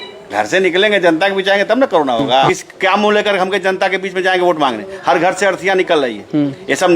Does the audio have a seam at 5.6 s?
no; 1 cut; at 2.5 s

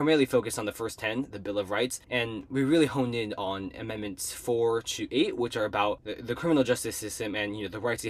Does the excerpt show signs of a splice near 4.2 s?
no; 2 cuts; at 2.0 s, 6.1 s

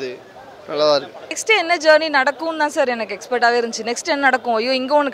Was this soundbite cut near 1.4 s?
yes; 1 cut; at 1.4 s

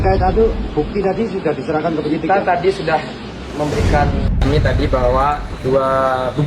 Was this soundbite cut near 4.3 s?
yes; 1 cut; at 4.3 s

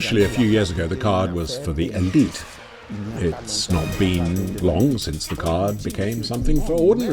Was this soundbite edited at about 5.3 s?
no; 1 cut; at 2.9 s

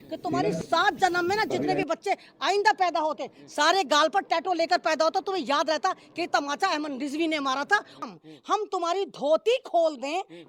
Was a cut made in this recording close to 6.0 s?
no; 1 cut; at 8.0 s

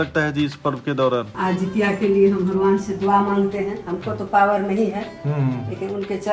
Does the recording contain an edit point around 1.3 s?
yes; 1 cut; at 1.3 s

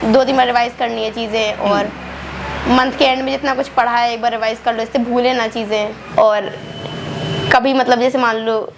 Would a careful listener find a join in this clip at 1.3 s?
no; 1 cut; at 6.0 s

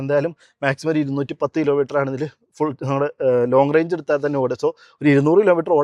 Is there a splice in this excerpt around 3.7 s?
no; 0 cuts

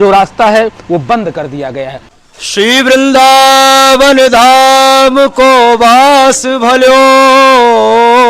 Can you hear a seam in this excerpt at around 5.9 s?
no; 1 cut; at 2.0 s

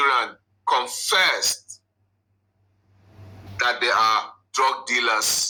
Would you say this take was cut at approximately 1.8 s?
no; 0 cuts

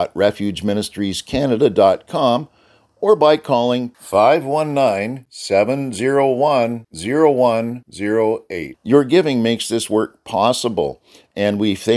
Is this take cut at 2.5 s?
no; 0 cuts

